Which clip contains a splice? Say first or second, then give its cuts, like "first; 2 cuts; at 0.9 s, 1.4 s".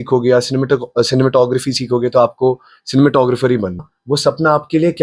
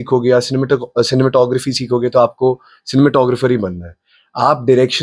first; 1 cut; at 4.0 s